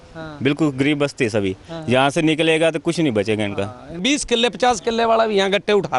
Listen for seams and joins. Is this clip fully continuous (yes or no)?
no